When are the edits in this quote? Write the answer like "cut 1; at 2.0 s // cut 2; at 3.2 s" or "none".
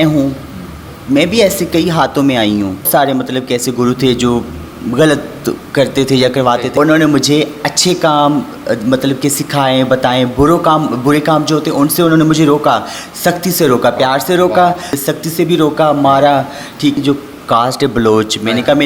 cut 1; at 2.9 s // cut 2; at 6.7 s // cut 3; at 15.0 s // cut 4; at 17.0 s